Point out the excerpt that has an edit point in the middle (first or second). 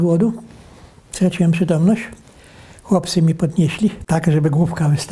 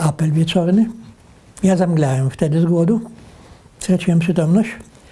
first